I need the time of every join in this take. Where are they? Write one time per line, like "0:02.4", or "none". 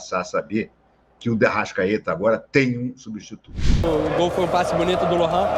0:03.8

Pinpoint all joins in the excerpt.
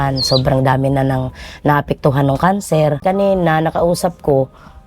0:03.0

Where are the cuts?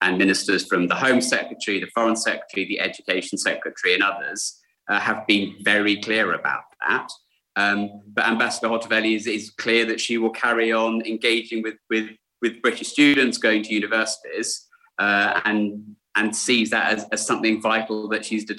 0:13.2

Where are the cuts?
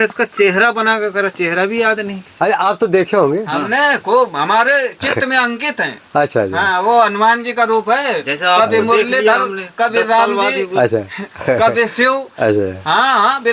none

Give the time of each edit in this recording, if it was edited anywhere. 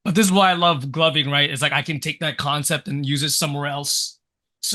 none

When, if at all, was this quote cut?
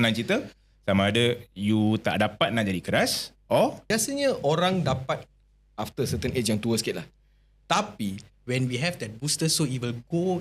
0:03.9
0:08.3

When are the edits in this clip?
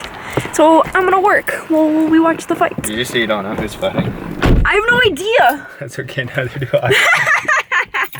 none

